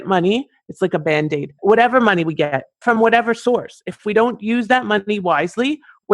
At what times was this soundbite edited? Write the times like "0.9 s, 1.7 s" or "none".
1.5 s, 2.9 s